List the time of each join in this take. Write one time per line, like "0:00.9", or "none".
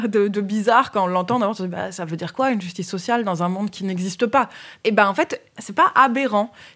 0:04.6
0:05.5